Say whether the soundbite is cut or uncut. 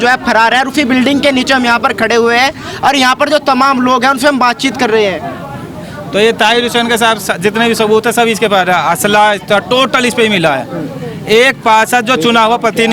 uncut